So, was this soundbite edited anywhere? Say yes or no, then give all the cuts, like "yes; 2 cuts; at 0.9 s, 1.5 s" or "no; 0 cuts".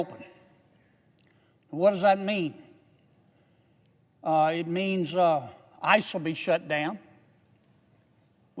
no; 0 cuts